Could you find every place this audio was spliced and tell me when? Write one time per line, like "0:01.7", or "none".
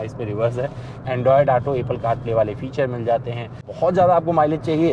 0:00.9
0:03.7